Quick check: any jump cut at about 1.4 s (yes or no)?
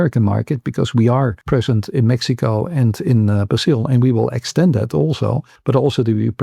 yes